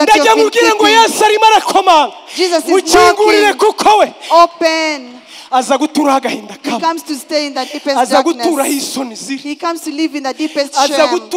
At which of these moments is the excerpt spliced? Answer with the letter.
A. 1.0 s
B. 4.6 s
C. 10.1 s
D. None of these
D